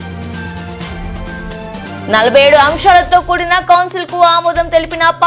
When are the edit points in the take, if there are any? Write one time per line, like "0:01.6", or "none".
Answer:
0:01.8